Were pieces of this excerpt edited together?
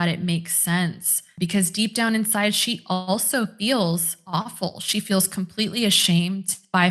no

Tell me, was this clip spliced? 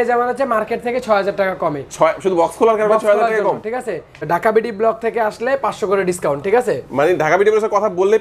yes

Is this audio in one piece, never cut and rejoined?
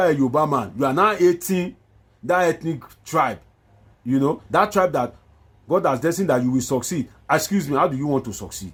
yes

